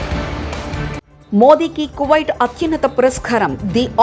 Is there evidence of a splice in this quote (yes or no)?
yes